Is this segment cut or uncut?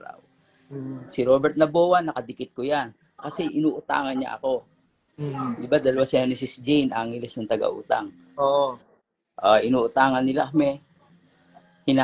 uncut